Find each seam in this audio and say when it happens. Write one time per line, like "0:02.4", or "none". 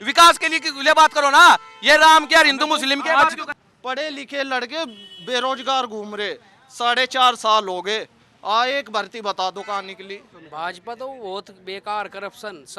0:03.5
0:10.3